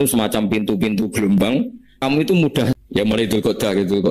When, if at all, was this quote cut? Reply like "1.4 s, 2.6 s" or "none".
2.0 s, 2.8 s